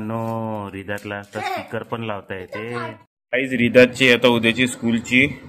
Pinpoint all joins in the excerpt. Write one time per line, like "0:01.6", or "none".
0:03.2